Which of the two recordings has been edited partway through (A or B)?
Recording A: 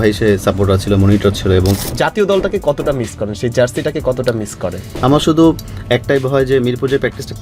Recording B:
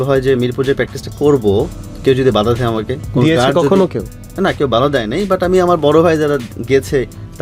A